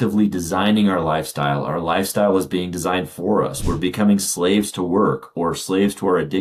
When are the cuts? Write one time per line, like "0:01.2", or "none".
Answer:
none